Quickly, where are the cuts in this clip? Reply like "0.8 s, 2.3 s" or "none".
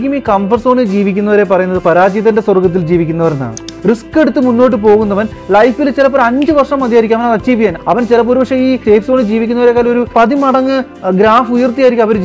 3.7 s, 7.8 s, 8.8 s